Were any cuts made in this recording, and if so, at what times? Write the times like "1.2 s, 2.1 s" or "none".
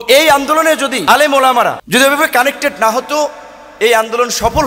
1.0 s, 1.8 s